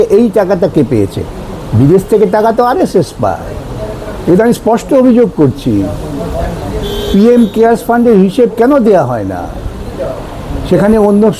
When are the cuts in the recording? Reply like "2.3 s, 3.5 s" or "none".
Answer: none